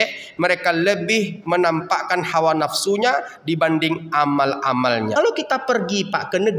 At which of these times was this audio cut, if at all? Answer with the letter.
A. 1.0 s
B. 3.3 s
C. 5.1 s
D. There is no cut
C